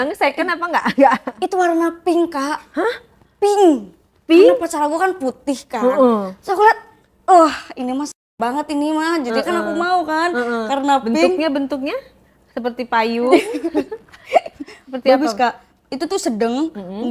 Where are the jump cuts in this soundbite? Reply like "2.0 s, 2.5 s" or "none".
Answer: none